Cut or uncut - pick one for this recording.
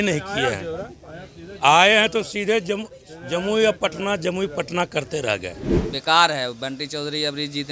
cut